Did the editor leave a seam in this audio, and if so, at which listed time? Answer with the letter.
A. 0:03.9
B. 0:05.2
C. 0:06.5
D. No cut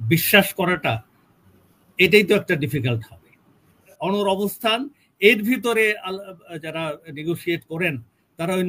A